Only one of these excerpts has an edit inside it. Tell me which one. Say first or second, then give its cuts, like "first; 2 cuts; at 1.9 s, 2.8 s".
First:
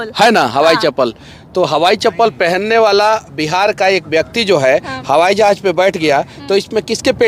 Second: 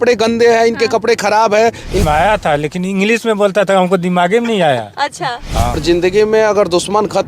second; 2 cuts; at 2.0 s, 5.7 s